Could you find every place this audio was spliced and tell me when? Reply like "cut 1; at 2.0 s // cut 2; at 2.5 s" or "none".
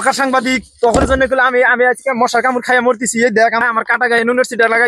cut 1; at 3.6 s